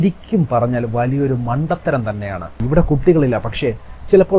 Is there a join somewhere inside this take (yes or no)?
no